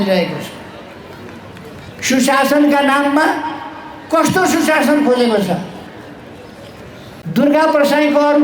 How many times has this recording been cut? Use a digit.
1